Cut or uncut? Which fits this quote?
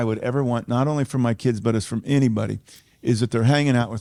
uncut